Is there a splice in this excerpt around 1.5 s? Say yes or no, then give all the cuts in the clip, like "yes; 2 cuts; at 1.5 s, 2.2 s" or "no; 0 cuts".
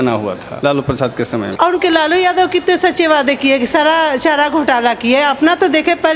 yes; 1 cut; at 1.5 s